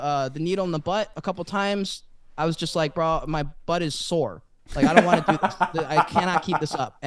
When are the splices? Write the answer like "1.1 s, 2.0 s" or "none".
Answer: none